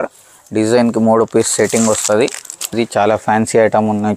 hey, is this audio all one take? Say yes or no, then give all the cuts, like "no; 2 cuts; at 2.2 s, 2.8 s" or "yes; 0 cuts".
no; 1 cut; at 2.7 s